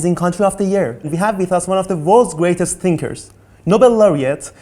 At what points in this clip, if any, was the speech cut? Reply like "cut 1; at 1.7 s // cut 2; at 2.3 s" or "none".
cut 1; at 1.1 s